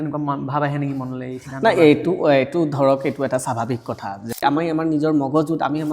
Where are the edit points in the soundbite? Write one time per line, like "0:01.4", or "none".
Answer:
0:04.4